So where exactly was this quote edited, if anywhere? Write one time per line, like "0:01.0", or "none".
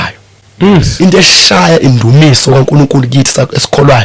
0:00.9